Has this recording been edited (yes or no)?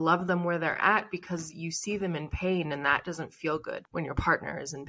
yes